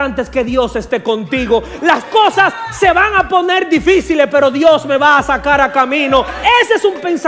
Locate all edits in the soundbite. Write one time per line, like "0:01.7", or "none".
0:06.3